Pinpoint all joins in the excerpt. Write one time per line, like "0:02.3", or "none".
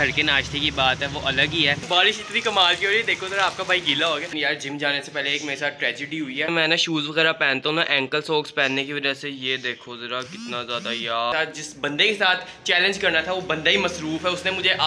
0:01.8
0:04.3
0:06.5
0:11.5

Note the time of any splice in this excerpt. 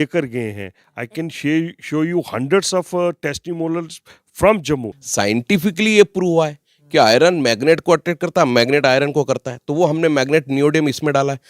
0:05.0

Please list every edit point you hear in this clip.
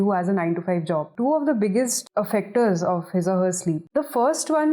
0:01.1
0:02.0
0:03.8

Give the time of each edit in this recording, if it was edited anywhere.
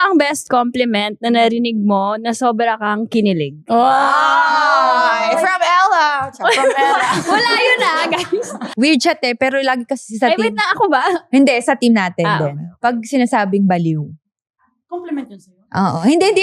none

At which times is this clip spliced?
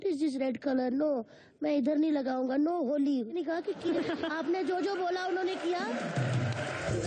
none

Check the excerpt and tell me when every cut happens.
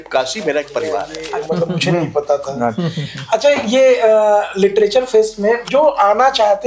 0:01.2
0:05.7

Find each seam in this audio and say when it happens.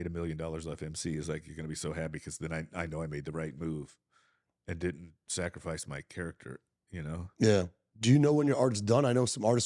0:07.7

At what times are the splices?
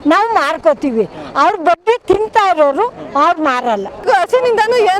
0:04.0

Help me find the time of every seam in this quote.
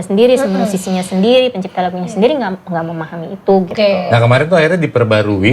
0:03.7

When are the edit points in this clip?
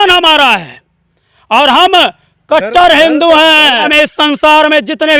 0:03.9

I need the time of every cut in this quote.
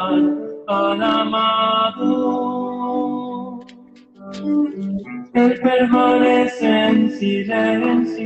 none

